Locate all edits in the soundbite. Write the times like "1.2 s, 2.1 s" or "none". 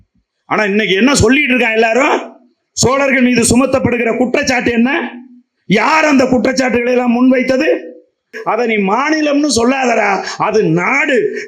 8.4 s